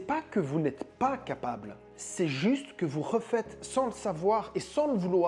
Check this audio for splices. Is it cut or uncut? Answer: uncut